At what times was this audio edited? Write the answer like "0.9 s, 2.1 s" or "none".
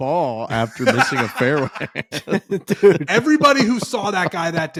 none